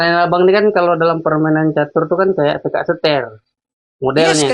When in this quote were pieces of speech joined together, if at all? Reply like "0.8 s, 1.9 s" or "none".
none